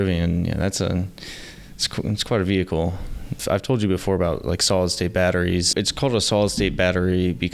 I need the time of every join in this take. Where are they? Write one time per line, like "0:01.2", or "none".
0:03.4
0:05.7